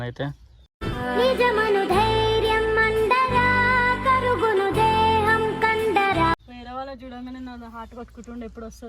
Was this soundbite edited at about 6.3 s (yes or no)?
yes